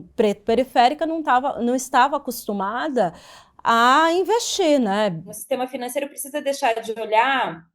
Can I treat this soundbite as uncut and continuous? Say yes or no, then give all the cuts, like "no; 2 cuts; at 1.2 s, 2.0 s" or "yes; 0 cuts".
no; 1 cut; at 5.3 s